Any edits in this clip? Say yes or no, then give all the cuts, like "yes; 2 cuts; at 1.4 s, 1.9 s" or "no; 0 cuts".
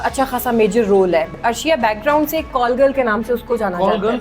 yes; 2 cuts; at 1.4 s, 2.5 s